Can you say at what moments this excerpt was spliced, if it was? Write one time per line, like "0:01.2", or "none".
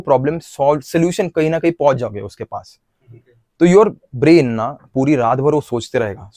none